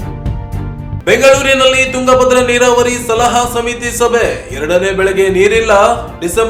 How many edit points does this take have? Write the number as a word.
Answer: zero